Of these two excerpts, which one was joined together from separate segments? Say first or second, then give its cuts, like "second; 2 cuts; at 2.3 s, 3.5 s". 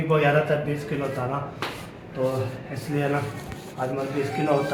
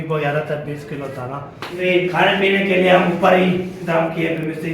second; 1 cut; at 1.8 s